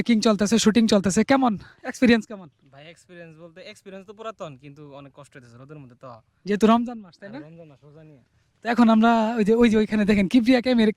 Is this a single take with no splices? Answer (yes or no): yes